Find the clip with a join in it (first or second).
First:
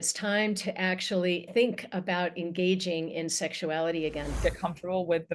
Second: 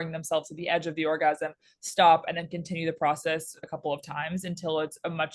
first